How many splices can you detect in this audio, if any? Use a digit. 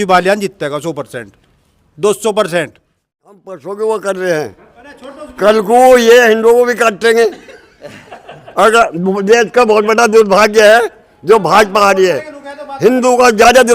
1